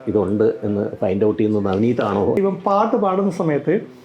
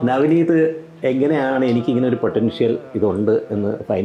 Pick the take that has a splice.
first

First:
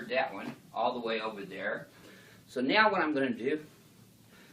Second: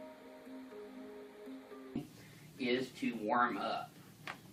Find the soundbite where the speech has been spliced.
first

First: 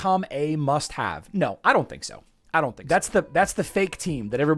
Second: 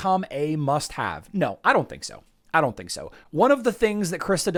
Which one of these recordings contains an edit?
first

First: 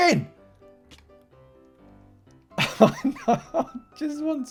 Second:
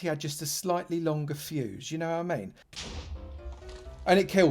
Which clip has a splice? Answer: second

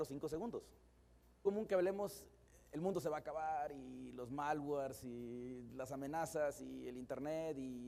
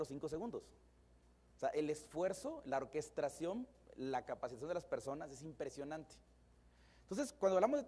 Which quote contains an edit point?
second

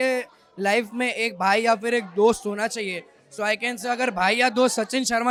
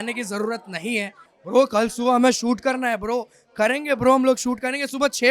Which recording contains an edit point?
second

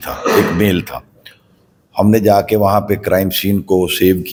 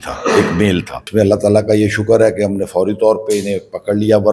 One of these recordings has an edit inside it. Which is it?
second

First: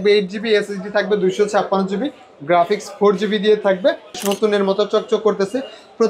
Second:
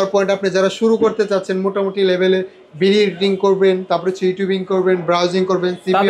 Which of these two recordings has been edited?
first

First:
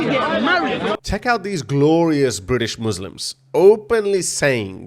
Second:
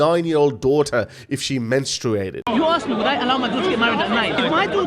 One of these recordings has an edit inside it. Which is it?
first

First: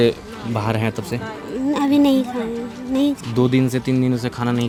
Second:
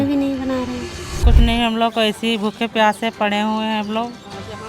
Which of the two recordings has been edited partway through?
second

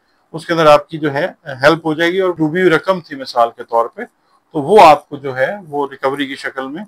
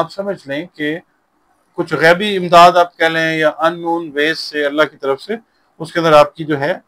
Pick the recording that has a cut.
first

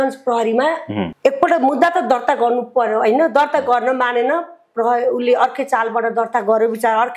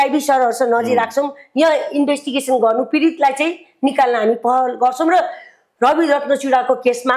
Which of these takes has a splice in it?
first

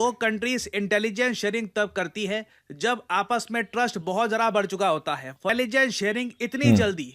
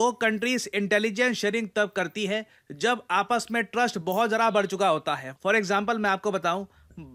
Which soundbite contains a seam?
first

